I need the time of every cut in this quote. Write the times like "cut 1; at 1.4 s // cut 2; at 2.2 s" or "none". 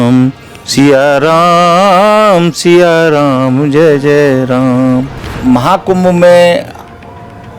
cut 1; at 5.3 s